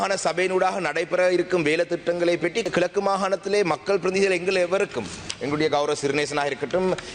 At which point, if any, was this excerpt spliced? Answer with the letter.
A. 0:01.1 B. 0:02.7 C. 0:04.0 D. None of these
B